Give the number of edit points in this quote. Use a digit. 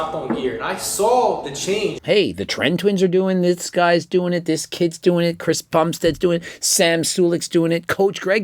1